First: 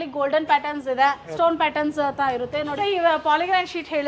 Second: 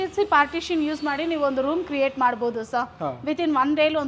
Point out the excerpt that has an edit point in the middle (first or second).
first